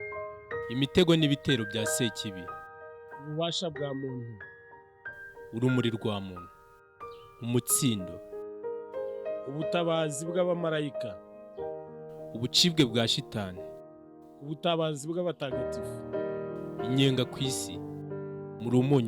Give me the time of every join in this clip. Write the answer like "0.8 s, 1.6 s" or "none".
none